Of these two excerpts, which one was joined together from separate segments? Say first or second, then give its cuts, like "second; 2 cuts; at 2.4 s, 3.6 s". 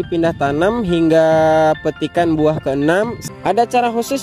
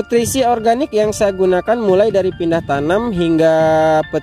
first; 1 cut; at 3.2 s